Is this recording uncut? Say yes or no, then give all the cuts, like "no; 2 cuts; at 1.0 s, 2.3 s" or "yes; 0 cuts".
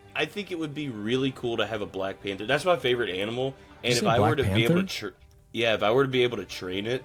yes; 0 cuts